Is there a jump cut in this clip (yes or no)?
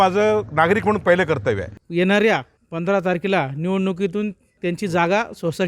yes